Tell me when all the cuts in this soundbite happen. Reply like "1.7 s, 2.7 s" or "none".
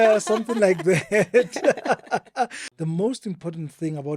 2.7 s